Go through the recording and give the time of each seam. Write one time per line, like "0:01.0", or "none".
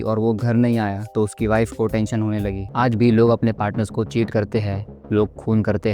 0:02.6